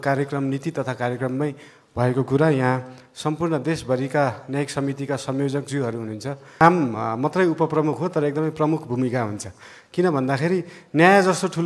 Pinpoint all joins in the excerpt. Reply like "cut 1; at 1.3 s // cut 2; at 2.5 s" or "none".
cut 1; at 6.6 s